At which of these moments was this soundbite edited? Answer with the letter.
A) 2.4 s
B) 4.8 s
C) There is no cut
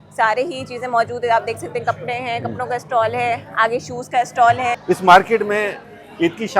B